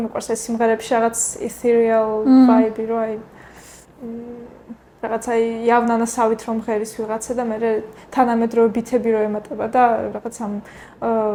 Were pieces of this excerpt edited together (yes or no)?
no